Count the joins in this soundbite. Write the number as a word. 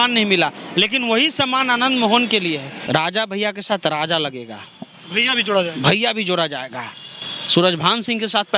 one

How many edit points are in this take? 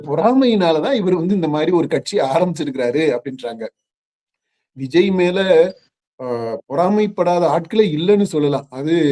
zero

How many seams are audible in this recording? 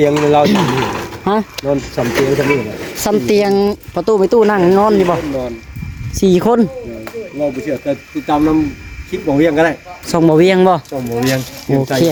zero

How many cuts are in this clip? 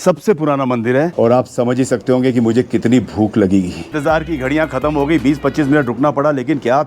two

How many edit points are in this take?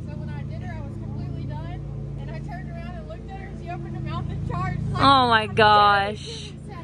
zero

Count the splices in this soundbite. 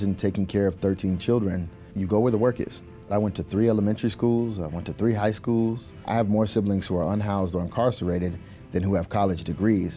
three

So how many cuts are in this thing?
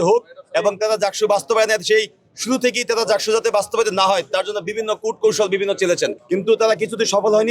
one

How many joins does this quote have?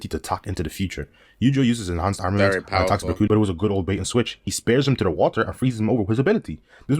zero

